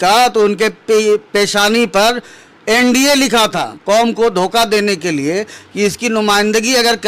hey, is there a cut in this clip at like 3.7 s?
yes; 1 cut; at 3.7 s

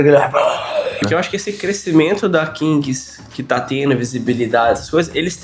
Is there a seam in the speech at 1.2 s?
yes; 1 cut; at 1.2 s

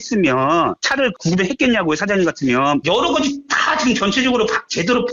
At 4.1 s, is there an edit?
no; 1 cut; at 2.8 s

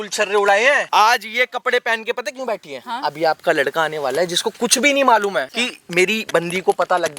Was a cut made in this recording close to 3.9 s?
no; 2 cuts; at 0.8 s, 5.5 s

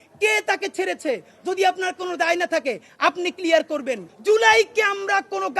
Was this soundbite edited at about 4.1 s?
yes; 1 cut; at 4.1 s

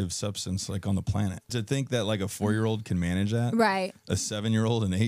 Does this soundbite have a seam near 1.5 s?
yes; 1 cut; at 1.5 s

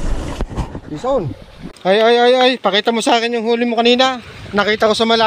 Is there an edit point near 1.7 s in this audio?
yes; 1 cut; at 1.7 s

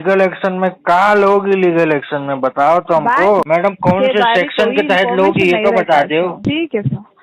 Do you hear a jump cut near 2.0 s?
no; 2 cuts; at 3.5 s, 6.4 s

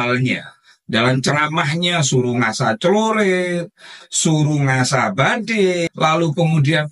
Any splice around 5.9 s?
yes; 1 cut; at 5.9 s

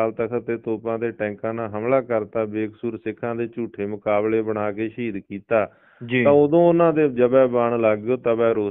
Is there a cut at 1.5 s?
no; 0 cuts

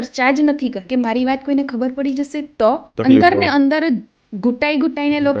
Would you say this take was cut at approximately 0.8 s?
yes; 2 cuts; at 0.8 s, 2.9 s

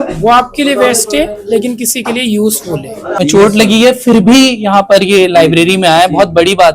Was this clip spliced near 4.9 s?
no; 1 cut; at 3.1 s

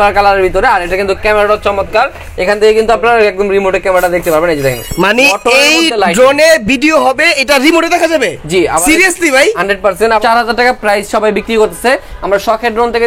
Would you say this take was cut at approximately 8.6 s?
no; 1 cut; at 10.2 s

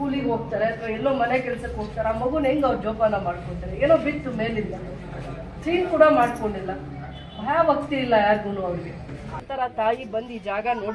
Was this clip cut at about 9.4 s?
yes; 1 cut; at 9.4 s

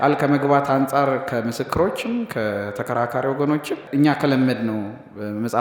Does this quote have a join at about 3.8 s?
yes; 1 cut; at 3.8 s

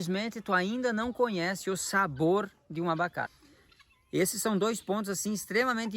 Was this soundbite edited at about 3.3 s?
yes; 1 cut; at 3.3 s

